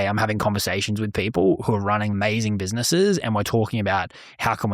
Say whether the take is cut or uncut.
cut